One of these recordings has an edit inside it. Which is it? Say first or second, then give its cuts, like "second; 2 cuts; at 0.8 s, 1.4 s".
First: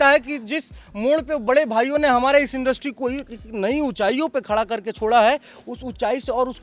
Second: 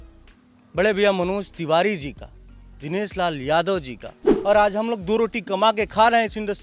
second; 1 cut; at 4.3 s